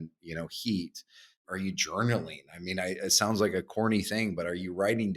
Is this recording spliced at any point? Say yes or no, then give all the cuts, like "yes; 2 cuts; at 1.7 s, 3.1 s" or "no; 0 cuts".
yes; 1 cut; at 1.4 s